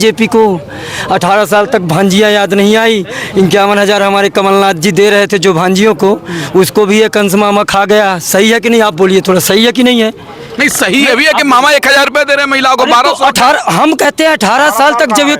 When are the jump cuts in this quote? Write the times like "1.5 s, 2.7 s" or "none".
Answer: none